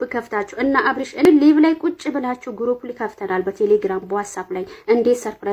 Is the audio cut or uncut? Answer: cut